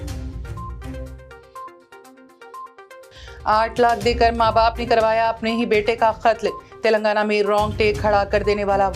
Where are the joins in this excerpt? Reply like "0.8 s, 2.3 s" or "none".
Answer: 2.2 s

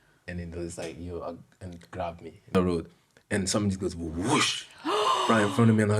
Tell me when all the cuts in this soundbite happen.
2.5 s

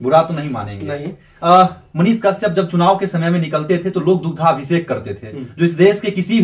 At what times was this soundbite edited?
none

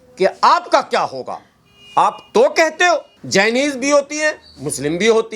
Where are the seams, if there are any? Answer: 3.2 s

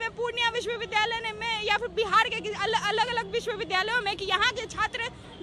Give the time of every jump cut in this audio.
none

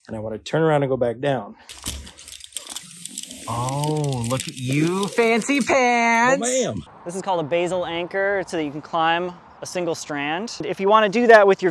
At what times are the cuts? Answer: 1.7 s, 6.8 s, 8.5 s, 10.6 s

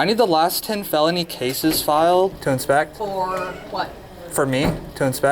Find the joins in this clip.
2.5 s, 4.0 s

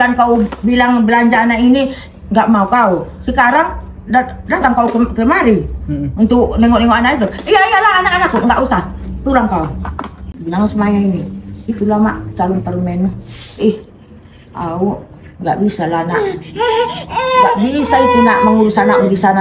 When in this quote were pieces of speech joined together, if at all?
10.3 s

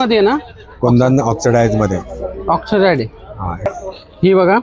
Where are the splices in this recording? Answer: 3.6 s

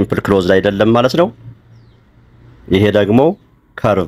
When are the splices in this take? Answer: none

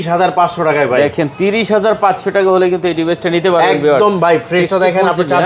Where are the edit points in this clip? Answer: none

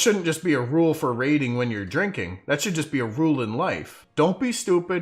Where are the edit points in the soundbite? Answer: 4.0 s

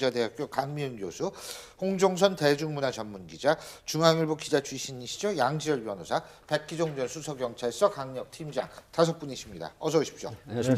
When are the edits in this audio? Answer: 4.5 s

